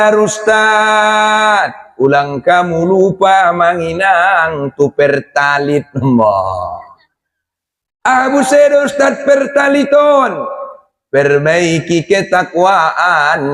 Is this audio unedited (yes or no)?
yes